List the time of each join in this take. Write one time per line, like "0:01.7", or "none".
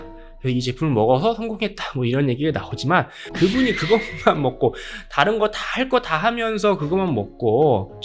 0:03.2